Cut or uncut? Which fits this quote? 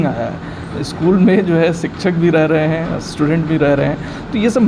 uncut